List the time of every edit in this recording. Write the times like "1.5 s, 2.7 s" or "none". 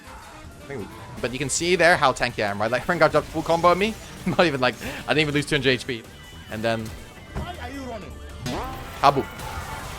1.2 s, 6.0 s